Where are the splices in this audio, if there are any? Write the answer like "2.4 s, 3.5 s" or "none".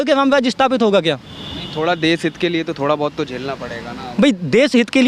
none